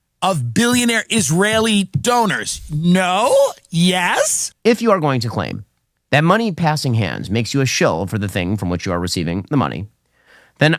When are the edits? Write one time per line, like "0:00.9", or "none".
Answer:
0:04.5